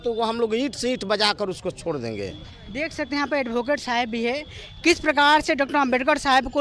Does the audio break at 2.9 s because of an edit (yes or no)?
no